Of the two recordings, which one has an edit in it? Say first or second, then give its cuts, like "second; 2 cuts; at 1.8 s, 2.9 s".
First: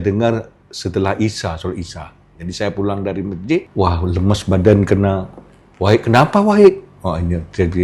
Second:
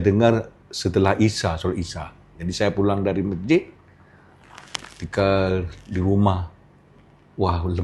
first; 1 cut; at 3.7 s